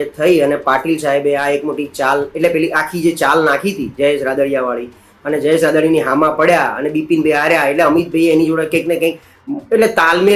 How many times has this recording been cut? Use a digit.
0